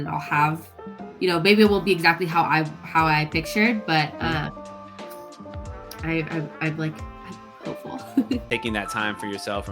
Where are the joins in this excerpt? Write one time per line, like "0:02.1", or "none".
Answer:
0:08.4